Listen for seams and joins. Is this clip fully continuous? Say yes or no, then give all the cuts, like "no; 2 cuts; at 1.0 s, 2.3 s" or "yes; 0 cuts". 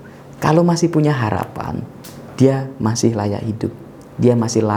yes; 0 cuts